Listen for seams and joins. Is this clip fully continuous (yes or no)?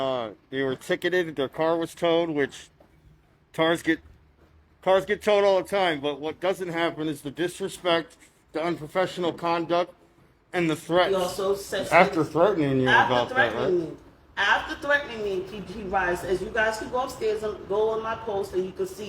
no